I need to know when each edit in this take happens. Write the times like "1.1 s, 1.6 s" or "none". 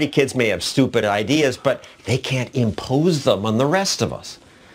none